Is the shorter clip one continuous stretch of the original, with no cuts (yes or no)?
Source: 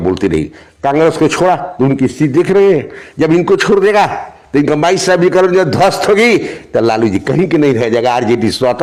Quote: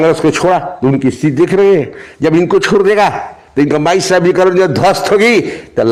yes